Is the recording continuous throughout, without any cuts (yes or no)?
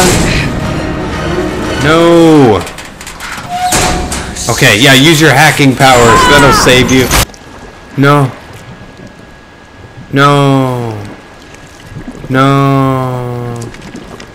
no